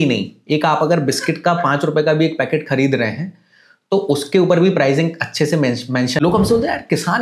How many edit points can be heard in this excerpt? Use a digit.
1